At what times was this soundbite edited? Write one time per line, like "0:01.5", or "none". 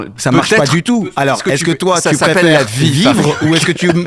0:01.0